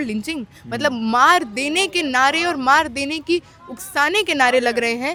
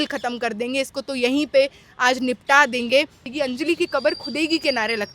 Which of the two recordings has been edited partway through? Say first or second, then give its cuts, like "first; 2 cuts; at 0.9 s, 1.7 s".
second; 1 cut; at 3.2 s